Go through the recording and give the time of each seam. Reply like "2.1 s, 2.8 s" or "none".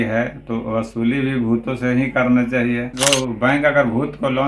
2.9 s